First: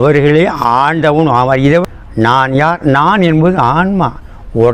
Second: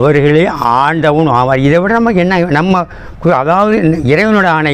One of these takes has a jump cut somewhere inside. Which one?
first; 1 cut; at 1.9 s

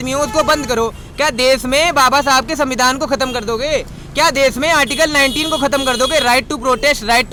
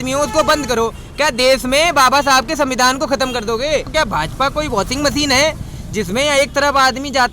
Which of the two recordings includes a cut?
second; 1 cut; at 3.9 s

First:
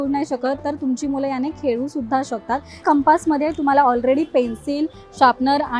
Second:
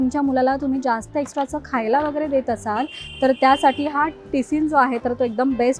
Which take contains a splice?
first; 1 cut; at 2.8 s

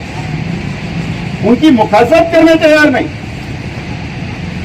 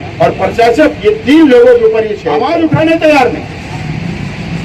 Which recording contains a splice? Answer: second; 1 cut; at 2.4 s

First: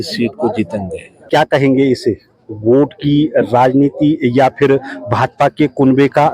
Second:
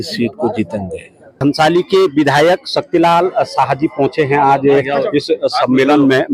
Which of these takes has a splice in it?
first; 1 cut; at 1.1 s

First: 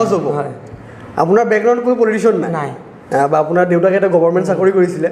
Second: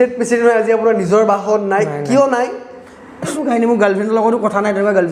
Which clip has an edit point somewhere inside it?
second; 1 cut; at 3.3 s

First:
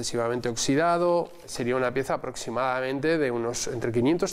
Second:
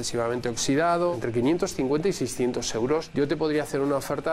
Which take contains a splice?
second; 2 cuts; at 1.1 s, 3.1 s

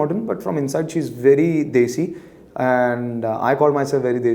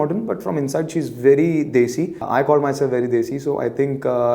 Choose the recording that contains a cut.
second; 1 cut; at 2.2 s

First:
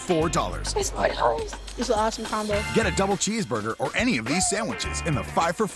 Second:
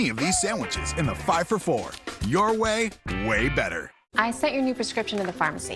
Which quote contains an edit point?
second; 1 cut; at 4.0 s

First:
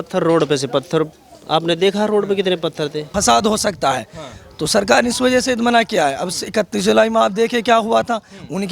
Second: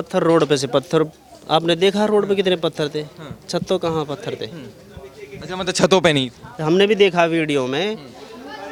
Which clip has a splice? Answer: first; 1 cut; at 3.0 s

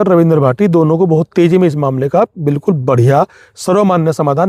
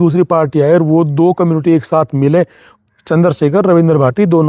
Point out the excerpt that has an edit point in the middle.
second; 1 cut; at 2.6 s

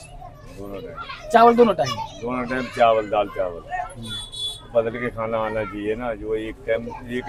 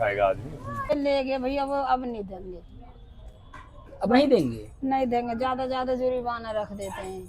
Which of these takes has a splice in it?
second; 1 cut; at 0.9 s

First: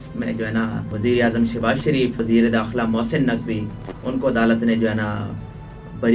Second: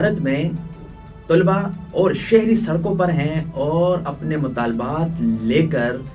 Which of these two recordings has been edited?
first; 2 cuts; at 0.9 s, 2.2 s

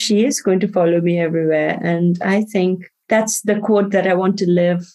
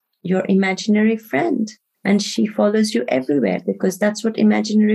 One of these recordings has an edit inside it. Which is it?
first; 1 cut; at 2.9 s

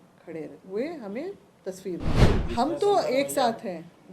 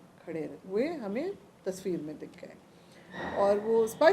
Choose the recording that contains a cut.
first; 1 cut; at 2.4 s

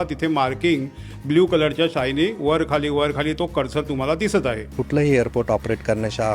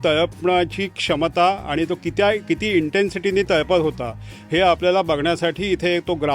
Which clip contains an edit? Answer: first; 1 cut; at 4.7 s

